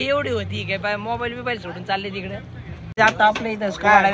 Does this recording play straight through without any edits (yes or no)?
no